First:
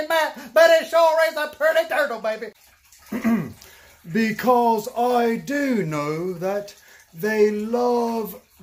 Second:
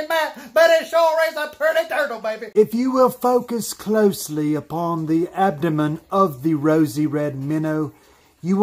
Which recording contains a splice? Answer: second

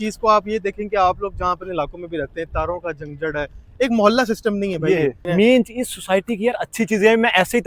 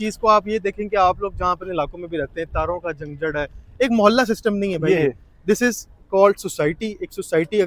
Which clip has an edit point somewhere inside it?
first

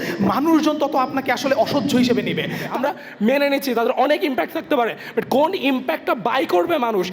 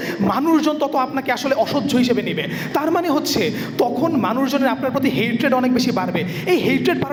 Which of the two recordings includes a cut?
first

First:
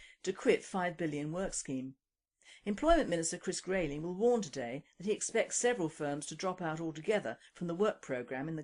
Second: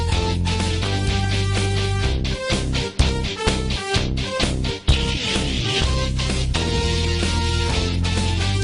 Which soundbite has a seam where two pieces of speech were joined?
first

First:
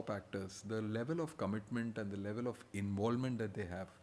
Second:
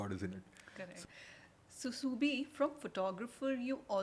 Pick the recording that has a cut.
second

